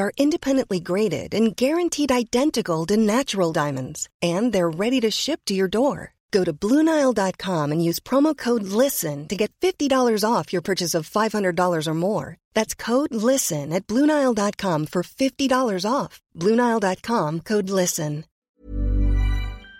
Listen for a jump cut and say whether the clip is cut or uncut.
cut